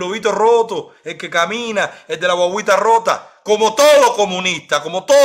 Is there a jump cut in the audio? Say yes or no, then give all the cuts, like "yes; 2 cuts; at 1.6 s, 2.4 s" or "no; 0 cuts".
no; 0 cuts